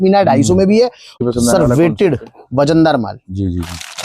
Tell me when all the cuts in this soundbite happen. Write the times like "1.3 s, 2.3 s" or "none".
1.1 s